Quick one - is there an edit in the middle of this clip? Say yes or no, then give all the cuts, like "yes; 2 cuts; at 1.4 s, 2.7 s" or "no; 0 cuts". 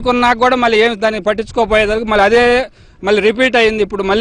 no; 0 cuts